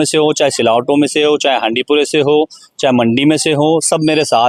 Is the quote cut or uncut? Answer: uncut